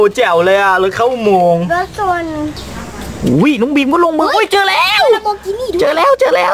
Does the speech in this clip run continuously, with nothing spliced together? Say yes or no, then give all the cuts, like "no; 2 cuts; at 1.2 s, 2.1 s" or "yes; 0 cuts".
no; 1 cut; at 2.5 s